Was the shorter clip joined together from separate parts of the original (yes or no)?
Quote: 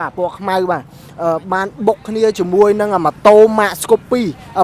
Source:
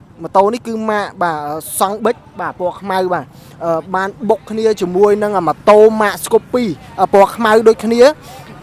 no